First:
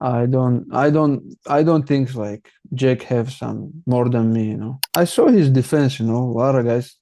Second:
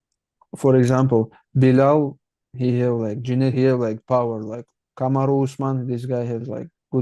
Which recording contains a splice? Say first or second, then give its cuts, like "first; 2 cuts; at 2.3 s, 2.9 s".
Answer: first; 1 cut; at 4.9 s